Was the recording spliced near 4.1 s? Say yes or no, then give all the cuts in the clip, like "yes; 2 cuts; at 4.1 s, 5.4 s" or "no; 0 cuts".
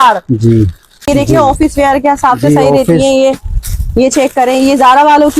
no; 1 cut; at 1.1 s